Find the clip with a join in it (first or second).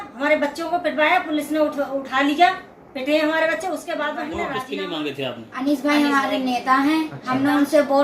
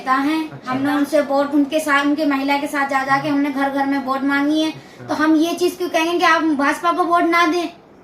first